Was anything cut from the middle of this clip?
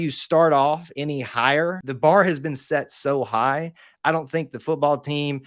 yes; 1 cut; at 1.9 s

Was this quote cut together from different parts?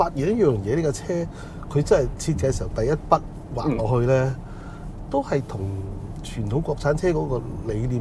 no; 0 cuts

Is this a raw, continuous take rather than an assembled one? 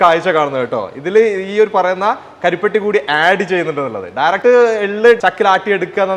yes; 0 cuts

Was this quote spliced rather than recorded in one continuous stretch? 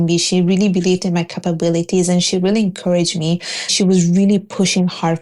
yes; 1 cut; at 3.7 s

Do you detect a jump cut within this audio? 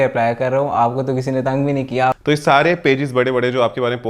yes; 1 cut; at 2.1 s

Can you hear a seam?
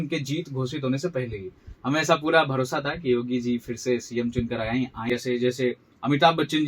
yes; 1 cut; at 5.1 s

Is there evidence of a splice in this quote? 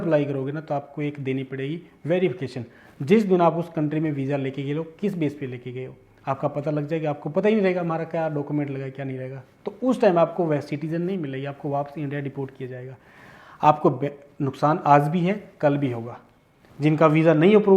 no; 0 cuts

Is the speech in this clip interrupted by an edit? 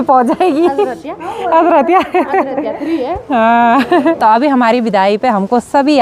no; 0 cuts

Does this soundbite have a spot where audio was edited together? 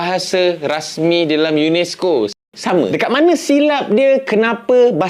yes; 1 cut; at 2.4 s

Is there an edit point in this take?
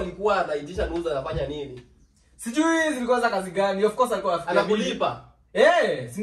no; 0 cuts

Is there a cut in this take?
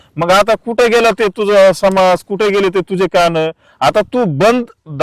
no; 0 cuts

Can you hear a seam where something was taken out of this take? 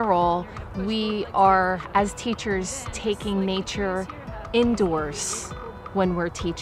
no; 0 cuts

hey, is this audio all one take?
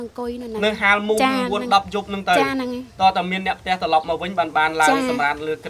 yes; 0 cuts

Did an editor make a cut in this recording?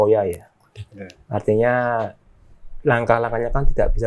no; 0 cuts

